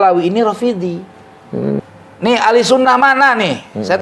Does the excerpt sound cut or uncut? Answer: cut